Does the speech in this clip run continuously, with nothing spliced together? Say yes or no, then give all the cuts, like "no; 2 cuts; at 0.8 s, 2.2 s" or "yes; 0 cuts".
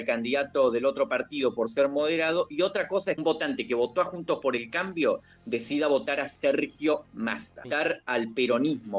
no; 2 cuts; at 3.2 s, 7.7 s